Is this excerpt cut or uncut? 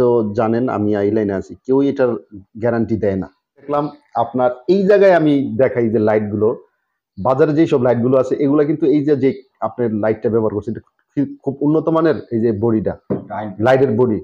cut